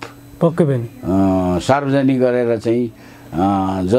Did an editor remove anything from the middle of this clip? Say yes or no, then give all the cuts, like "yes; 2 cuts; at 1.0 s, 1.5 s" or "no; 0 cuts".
no; 0 cuts